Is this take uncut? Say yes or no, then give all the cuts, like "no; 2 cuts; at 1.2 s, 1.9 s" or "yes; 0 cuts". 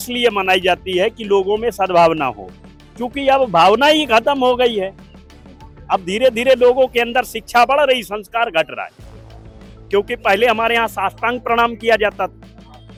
yes; 0 cuts